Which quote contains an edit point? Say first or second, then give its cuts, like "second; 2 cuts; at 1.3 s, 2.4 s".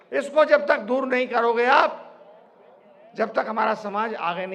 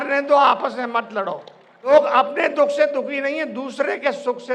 second; 1 cut; at 1.9 s